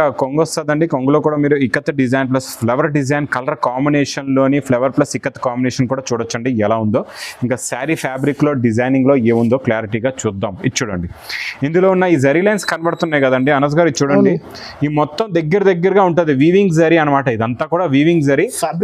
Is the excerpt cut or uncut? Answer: uncut